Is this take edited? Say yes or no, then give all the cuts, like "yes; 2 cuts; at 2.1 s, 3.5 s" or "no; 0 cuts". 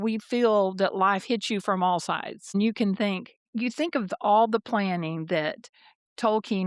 no; 0 cuts